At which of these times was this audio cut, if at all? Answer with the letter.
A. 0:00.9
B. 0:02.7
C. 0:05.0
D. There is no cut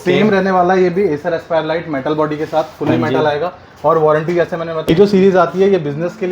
C